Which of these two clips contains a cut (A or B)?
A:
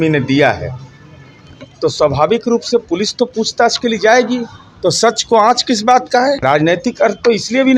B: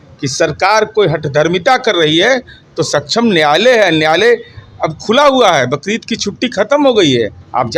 A